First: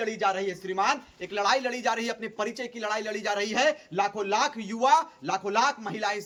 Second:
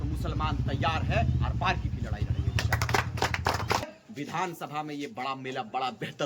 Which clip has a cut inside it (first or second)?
second